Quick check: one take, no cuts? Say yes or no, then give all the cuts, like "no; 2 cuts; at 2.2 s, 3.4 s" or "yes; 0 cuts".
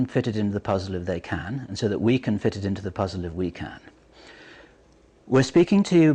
no; 1 cut; at 1.4 s